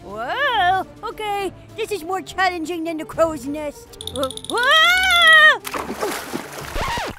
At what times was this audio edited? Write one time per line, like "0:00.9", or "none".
none